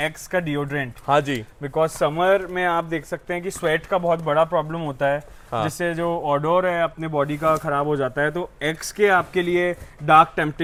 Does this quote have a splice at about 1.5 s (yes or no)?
no